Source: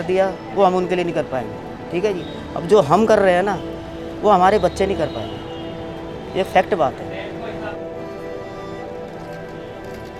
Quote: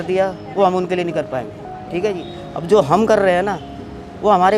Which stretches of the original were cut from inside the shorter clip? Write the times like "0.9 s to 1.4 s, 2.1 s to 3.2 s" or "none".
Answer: none